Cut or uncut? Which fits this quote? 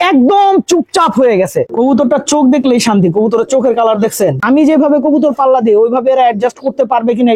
cut